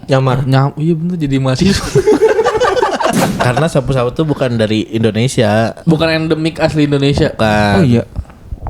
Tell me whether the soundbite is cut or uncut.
cut